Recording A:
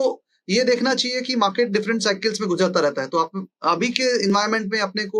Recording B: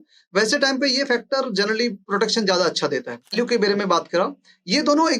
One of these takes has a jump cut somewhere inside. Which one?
B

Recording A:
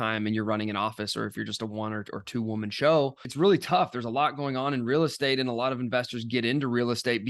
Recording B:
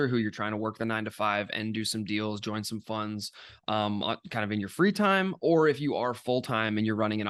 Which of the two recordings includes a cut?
A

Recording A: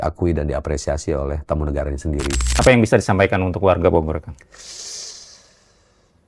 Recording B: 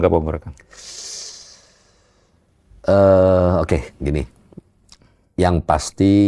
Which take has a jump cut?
A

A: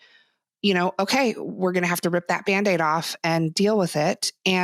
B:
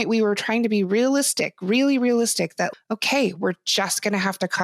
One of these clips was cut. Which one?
B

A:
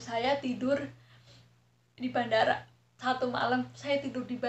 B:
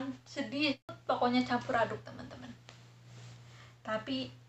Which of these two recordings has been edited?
B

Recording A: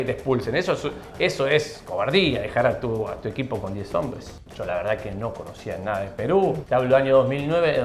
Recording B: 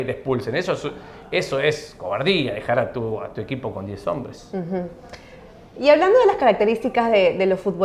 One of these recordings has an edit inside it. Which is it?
A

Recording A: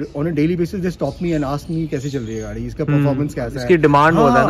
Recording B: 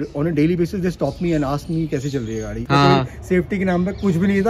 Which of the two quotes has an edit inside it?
B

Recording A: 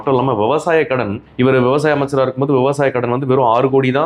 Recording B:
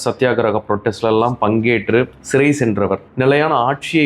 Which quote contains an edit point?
B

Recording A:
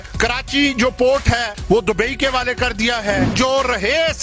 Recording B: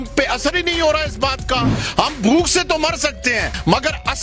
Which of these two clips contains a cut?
A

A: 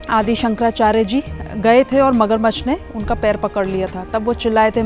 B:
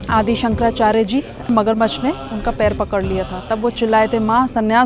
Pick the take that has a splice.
B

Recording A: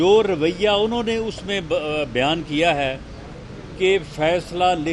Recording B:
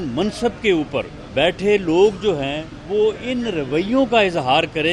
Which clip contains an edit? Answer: B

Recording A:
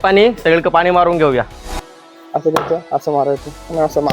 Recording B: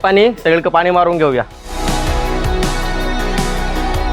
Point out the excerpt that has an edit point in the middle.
A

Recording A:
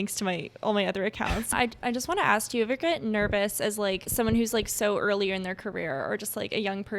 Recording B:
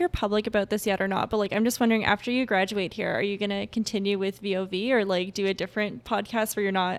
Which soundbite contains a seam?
A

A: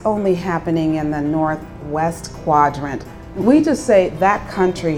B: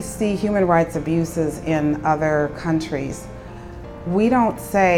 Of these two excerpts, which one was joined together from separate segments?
A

